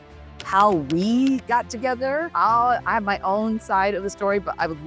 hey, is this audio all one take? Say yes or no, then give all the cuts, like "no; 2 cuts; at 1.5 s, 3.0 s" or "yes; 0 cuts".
no; 1 cut; at 2.3 s